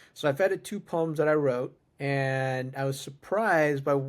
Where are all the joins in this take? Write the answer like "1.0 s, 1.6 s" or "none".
1.8 s